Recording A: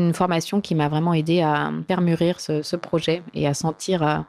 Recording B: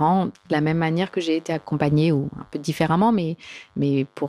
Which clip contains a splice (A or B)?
A